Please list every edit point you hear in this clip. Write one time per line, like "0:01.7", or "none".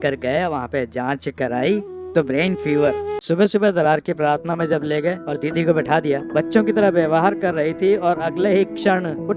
0:03.1
0:06.3